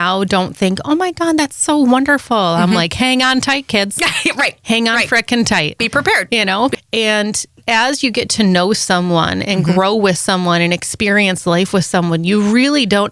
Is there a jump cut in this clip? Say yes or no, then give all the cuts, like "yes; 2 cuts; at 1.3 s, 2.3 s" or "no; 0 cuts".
yes; 1 cut; at 6.7 s